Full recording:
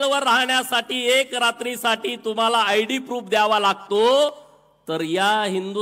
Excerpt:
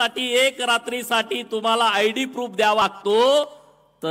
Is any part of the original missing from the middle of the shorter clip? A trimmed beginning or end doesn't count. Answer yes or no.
yes